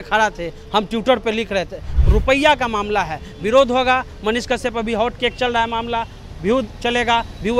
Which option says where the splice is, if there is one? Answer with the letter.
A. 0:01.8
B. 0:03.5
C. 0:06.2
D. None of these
A